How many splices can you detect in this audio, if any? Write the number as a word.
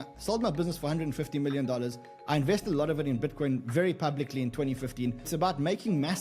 one